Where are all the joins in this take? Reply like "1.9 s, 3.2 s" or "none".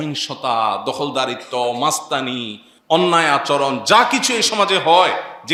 none